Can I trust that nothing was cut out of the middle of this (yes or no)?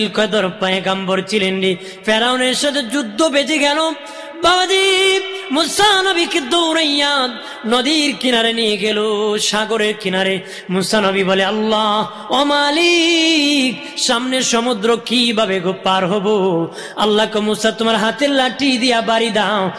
yes